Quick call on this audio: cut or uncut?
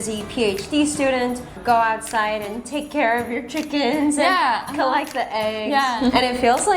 cut